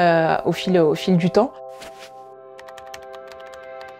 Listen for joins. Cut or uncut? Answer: cut